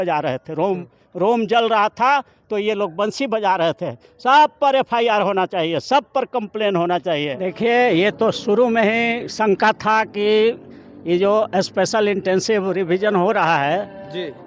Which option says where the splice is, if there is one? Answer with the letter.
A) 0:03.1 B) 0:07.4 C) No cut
B